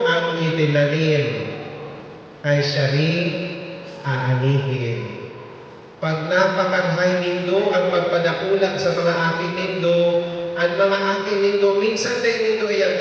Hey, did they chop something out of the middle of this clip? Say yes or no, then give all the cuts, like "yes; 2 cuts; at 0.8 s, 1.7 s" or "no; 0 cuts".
no; 0 cuts